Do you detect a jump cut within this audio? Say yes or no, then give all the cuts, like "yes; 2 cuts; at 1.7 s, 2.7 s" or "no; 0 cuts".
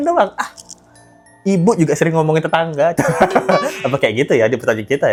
no; 0 cuts